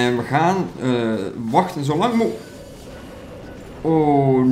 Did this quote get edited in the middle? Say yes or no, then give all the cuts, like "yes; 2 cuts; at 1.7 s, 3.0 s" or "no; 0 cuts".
no; 0 cuts